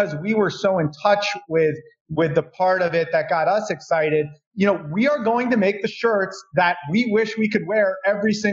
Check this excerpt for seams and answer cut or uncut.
cut